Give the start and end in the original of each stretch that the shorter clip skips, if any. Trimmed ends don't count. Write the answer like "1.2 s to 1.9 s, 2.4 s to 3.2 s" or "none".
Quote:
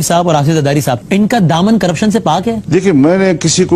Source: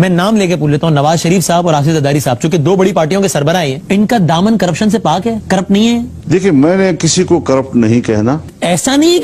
2.4 s to 3.8 s, 5.4 s to 6.2 s